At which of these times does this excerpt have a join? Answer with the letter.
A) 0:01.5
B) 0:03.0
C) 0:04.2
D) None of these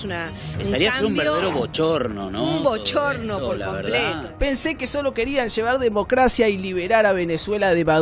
C